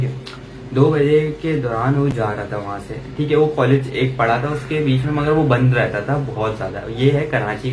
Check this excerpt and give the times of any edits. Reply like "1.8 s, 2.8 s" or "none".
none